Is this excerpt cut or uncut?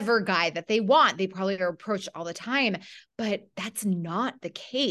uncut